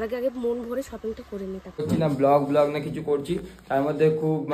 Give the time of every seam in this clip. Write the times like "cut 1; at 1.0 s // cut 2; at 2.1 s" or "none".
cut 1; at 1.8 s